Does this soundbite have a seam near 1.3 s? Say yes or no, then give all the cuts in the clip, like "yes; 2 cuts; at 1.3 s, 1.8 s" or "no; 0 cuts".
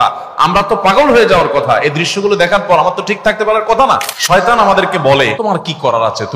no; 2 cuts; at 4.1 s, 5.3 s